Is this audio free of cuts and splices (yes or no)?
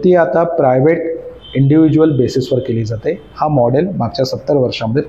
yes